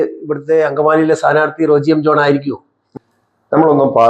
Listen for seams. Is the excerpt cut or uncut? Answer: cut